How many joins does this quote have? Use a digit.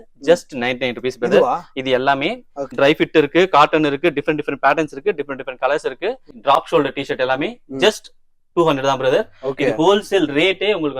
2